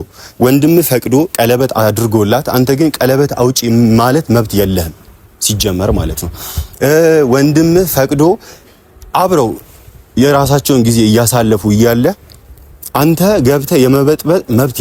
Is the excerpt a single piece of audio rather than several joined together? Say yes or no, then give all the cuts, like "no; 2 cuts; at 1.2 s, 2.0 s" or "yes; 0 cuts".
yes; 0 cuts